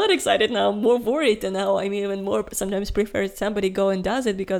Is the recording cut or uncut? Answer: uncut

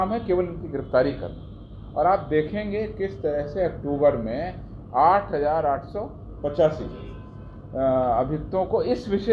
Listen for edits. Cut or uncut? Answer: uncut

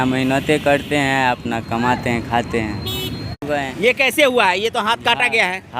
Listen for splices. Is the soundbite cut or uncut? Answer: cut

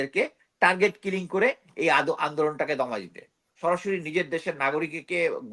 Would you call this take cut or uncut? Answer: cut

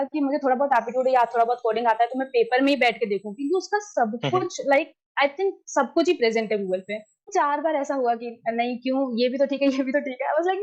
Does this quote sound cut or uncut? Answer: cut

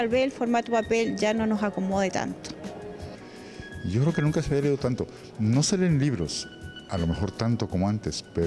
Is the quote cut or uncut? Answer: cut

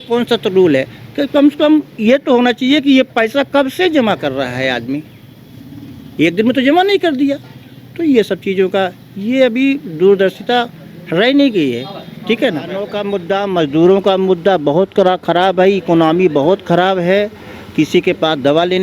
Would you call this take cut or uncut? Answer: cut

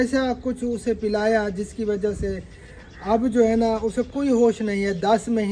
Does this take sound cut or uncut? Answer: uncut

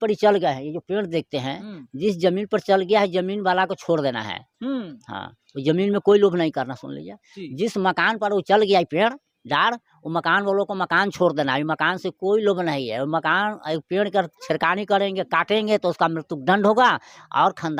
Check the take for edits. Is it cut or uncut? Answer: uncut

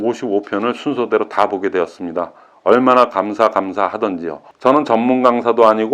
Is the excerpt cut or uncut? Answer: cut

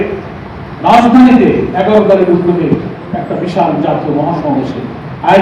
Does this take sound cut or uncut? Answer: uncut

